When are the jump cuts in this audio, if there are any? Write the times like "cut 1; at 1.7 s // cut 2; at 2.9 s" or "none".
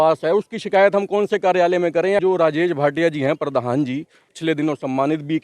cut 1; at 2.2 s // cut 2; at 4.3 s